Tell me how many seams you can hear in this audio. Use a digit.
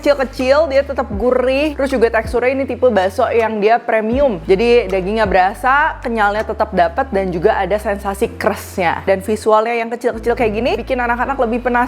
4